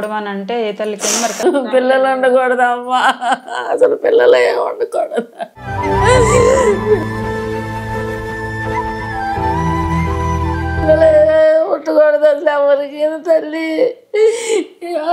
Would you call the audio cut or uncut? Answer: cut